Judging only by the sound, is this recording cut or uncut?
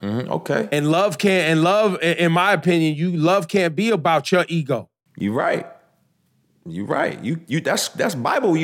uncut